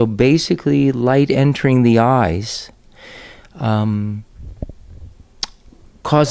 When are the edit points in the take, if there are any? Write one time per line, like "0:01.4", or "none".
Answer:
none